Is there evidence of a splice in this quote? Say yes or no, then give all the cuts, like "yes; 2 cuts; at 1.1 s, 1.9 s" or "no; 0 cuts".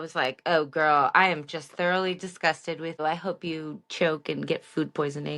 yes; 1 cut; at 3.0 s